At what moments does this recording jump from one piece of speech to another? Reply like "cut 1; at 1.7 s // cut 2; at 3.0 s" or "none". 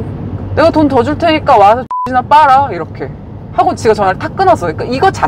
none